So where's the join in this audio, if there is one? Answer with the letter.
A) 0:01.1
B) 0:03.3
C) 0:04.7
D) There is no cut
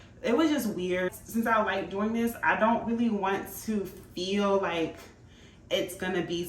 A